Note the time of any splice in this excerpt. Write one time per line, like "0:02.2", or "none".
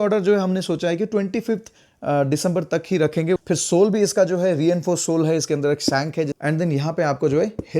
0:03.4
0:06.3